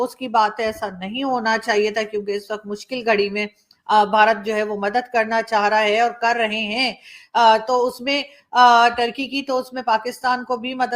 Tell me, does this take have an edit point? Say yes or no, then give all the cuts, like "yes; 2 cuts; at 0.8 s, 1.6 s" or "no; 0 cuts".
no; 0 cuts